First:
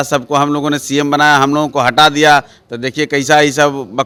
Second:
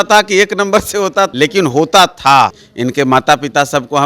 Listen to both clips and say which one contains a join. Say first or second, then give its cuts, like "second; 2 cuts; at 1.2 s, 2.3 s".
second; 2 cuts; at 1.3 s, 2.7 s